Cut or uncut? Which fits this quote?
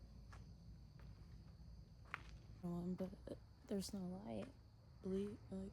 cut